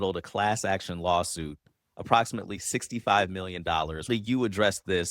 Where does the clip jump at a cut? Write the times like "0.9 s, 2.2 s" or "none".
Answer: 4.1 s